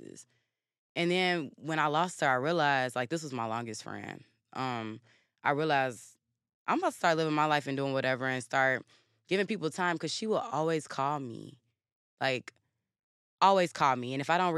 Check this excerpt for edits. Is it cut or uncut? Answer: uncut